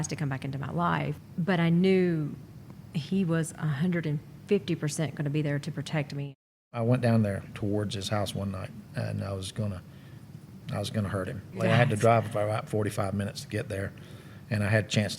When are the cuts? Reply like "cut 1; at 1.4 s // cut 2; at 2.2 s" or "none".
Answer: cut 1; at 1.2 s // cut 2; at 6.8 s // cut 3; at 11.6 s

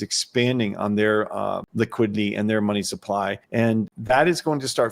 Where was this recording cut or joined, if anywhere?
cut 1; at 1.6 s // cut 2; at 3.7 s

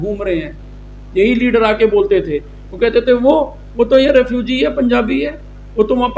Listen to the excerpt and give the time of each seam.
none

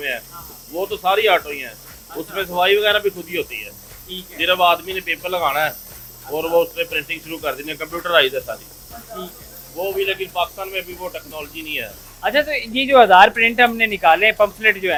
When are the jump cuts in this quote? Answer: none

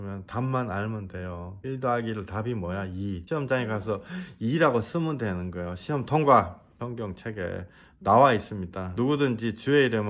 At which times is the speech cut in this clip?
cut 1; at 1.5 s // cut 2; at 3.2 s // cut 3; at 6.8 s // cut 4; at 7.8 s // cut 5; at 8.9 s

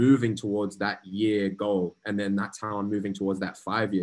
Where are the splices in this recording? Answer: none

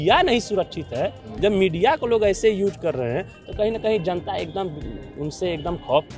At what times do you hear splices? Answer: none

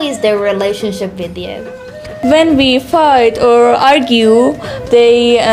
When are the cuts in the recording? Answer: cut 1; at 2.2 s

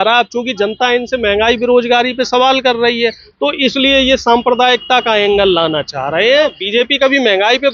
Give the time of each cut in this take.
cut 1; at 6.6 s

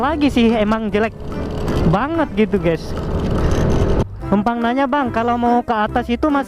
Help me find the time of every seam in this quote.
cut 1; at 4.1 s

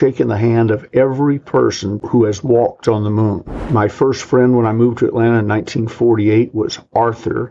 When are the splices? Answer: cut 1; at 1.9 s

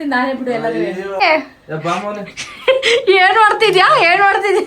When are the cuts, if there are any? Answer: cut 1; at 1.2 s

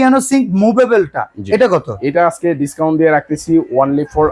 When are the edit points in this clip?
none

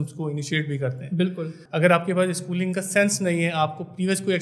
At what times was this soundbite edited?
cut 1; at 1.6 s

